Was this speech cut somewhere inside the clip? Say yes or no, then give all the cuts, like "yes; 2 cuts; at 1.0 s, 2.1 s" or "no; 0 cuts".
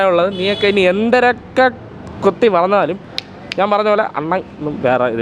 no; 0 cuts